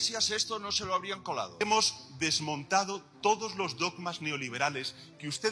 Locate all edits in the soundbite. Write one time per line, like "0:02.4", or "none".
0:01.6